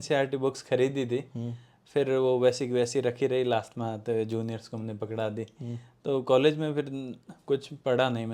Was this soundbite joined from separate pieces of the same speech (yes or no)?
no